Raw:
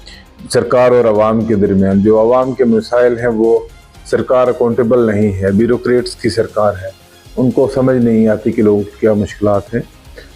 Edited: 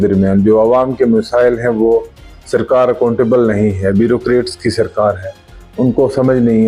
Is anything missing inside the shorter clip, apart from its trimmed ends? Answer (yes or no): no